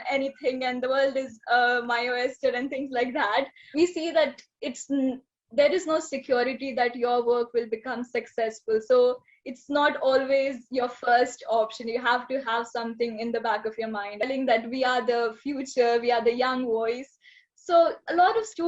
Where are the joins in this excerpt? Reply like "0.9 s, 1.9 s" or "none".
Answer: 3.6 s, 14.2 s